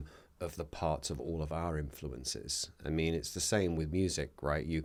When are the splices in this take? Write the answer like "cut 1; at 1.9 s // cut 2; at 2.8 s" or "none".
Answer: none